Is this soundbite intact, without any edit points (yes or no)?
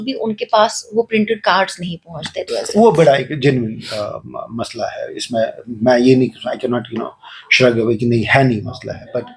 no